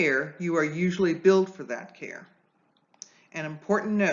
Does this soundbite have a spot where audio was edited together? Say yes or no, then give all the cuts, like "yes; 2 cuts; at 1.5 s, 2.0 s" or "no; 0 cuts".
no; 0 cuts